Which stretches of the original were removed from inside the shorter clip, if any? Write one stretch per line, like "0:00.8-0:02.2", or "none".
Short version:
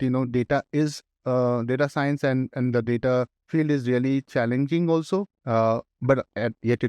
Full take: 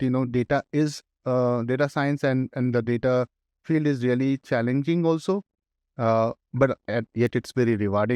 0:03.4-0:03.5
0:05.5-0:05.9